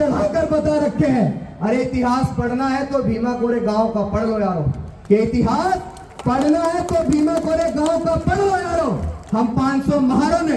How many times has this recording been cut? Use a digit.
0